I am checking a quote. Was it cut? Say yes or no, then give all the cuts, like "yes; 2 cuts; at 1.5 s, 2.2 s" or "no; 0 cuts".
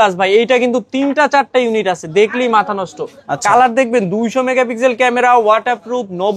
no; 0 cuts